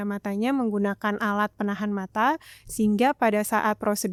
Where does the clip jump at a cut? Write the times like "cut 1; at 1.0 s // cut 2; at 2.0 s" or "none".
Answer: none